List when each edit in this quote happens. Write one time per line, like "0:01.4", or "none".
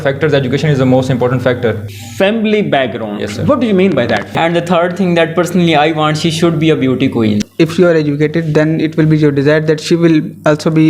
0:01.8
0:04.3
0:07.4